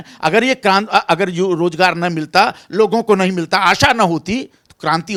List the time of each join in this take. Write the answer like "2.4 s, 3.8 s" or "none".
none